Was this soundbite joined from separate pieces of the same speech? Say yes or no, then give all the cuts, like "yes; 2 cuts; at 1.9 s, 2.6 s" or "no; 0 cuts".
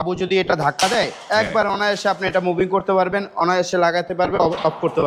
no; 0 cuts